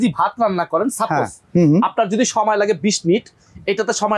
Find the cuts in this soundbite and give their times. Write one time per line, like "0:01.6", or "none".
none

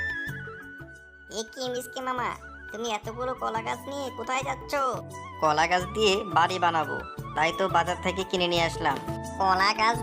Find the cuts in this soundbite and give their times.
none

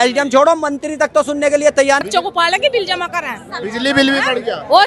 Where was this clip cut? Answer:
0:02.0

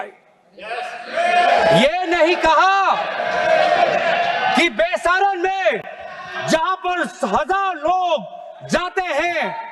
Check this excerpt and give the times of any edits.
none

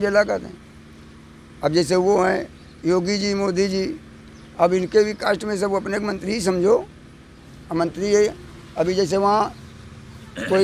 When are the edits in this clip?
none

